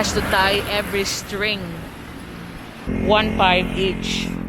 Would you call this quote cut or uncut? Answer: cut